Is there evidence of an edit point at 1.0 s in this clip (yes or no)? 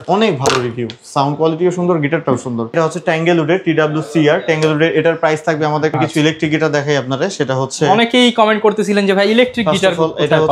no